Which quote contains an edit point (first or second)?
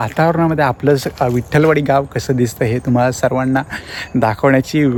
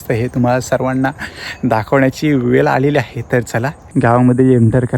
second